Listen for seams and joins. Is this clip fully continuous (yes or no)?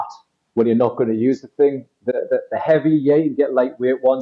yes